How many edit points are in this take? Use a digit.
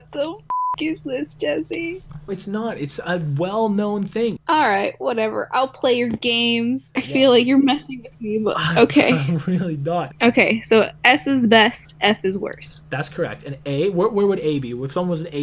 2